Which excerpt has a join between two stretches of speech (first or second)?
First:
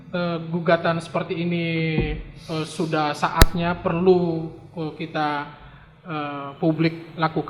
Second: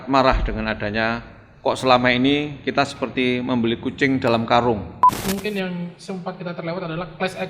second